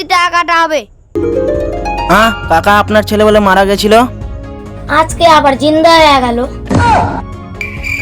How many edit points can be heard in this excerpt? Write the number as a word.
one